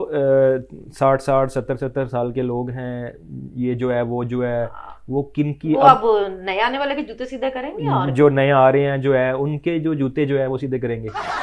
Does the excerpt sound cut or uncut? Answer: uncut